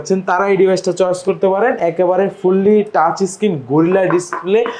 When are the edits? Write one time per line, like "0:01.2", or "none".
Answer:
none